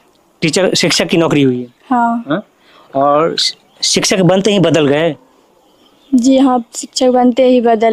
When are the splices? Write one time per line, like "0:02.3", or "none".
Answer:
none